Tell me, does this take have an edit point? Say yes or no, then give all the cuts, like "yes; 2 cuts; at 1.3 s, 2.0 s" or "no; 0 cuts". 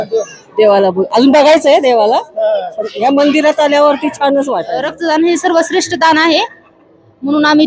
yes; 1 cut; at 4.9 s